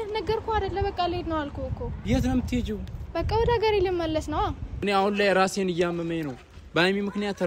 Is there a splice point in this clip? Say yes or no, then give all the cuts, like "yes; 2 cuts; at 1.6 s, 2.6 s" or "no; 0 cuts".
yes; 1 cut; at 4.7 s